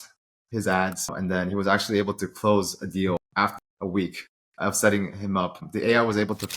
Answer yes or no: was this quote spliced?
yes